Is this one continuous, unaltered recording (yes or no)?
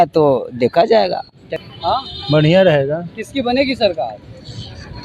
no